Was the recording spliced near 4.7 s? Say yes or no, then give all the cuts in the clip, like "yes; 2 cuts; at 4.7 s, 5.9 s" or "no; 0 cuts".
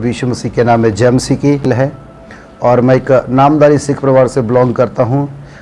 no; 1 cut; at 1.7 s